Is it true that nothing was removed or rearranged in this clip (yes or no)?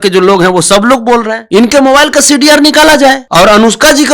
no